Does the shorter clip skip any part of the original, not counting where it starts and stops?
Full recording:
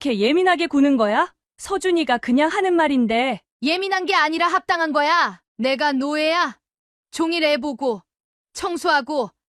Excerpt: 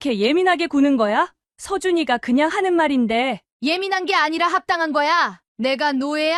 no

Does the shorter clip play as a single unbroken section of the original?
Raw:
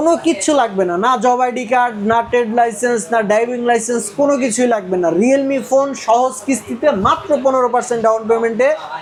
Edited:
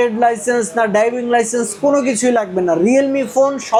yes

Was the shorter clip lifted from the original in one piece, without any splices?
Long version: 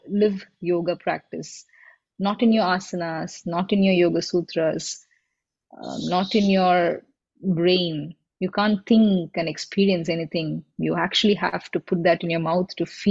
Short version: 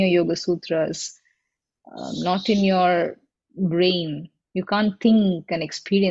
yes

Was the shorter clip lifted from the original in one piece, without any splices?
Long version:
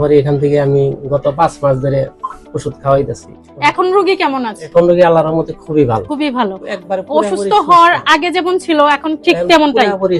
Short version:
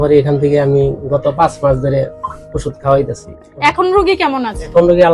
yes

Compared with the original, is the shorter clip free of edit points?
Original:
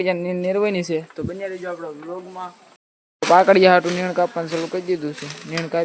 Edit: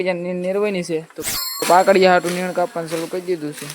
no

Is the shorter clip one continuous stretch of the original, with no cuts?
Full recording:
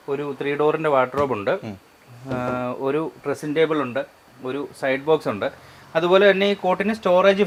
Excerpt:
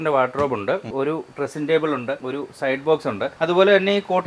no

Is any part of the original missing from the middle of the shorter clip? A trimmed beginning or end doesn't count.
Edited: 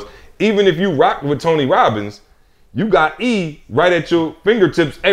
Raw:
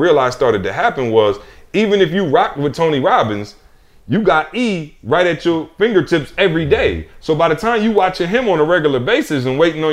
no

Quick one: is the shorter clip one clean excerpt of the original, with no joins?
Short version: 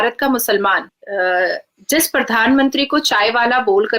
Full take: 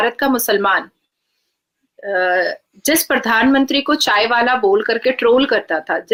no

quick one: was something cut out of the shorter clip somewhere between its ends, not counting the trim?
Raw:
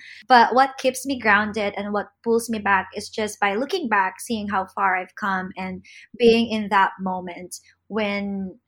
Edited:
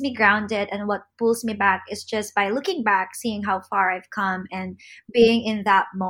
no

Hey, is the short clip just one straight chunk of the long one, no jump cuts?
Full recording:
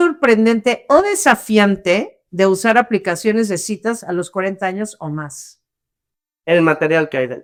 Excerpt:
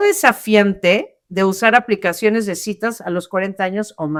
yes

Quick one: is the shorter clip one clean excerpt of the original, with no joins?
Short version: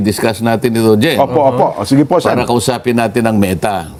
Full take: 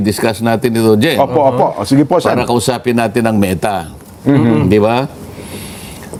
yes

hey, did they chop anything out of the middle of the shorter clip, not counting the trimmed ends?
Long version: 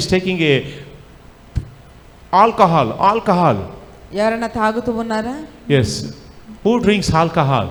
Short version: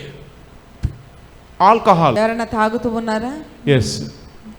yes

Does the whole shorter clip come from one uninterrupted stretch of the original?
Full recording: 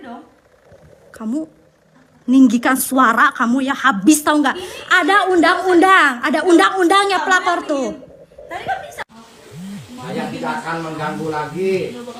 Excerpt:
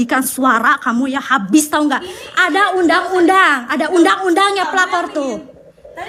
yes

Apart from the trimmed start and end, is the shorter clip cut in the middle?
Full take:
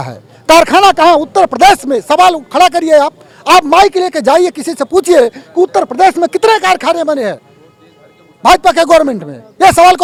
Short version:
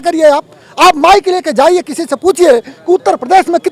no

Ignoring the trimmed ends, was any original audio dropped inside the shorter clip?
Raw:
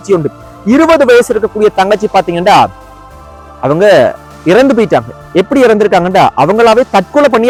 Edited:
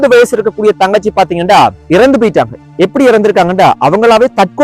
yes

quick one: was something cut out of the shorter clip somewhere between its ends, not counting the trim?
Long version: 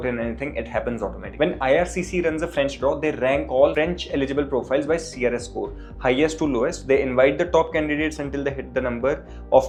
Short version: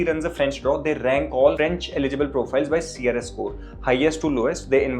no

